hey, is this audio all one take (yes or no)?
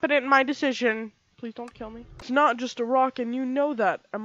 no